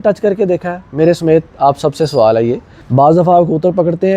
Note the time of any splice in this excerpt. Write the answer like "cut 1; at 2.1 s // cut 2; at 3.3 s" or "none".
cut 1; at 2.7 s